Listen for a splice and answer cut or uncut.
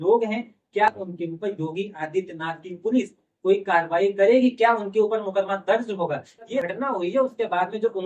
cut